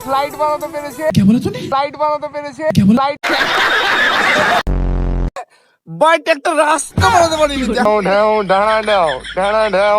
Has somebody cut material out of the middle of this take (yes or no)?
yes